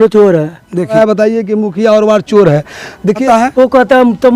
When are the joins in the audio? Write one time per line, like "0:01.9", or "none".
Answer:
0:01.0
0:03.2